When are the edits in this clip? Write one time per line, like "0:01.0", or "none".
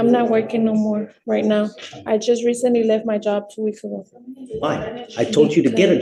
none